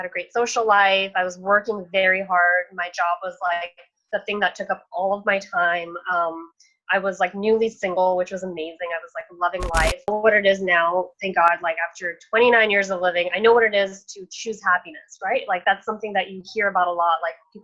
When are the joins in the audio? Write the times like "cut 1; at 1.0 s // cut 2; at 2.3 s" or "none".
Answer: cut 1; at 10.1 s